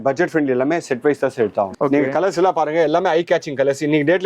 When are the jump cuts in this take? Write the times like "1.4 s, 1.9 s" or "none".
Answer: 1.8 s